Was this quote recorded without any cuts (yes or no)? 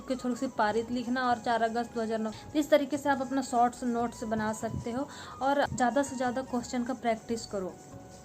no